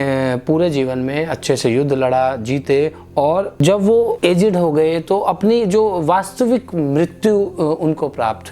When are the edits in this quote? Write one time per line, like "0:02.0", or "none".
0:03.6
0:04.2